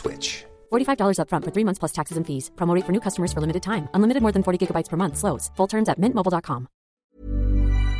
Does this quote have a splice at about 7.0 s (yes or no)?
yes